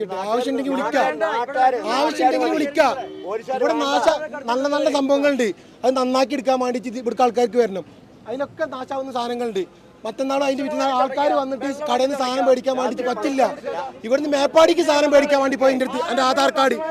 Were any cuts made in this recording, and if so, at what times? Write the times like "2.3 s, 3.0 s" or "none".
none